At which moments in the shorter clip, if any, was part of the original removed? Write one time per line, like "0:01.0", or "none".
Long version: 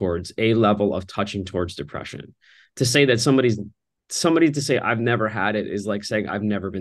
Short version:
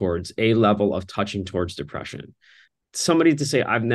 0:02.6